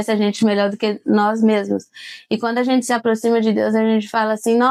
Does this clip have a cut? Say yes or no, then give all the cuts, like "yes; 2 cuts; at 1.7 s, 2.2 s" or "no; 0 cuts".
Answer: no; 0 cuts